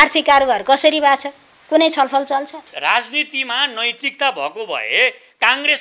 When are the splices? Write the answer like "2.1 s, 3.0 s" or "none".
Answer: 2.7 s